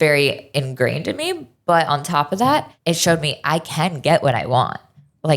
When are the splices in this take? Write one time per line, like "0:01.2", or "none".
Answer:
0:02.7